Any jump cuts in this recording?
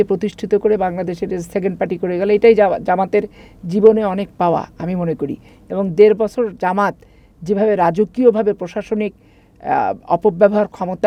no; 0 cuts

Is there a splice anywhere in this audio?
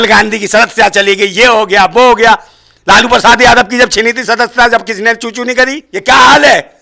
yes; 1 cut; at 5.9 s

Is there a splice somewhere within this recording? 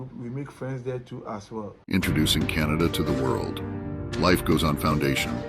yes; 1 cut; at 1.8 s

